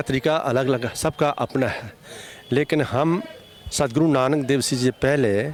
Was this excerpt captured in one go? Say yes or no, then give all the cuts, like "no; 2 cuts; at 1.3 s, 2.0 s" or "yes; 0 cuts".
yes; 0 cuts